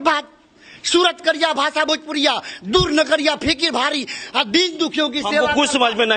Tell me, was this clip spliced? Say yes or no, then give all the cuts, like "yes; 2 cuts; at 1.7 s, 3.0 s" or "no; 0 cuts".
no; 0 cuts